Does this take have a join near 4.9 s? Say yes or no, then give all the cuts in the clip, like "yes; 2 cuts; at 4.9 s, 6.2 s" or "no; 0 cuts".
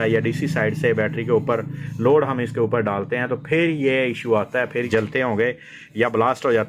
yes; 1 cut; at 4.9 s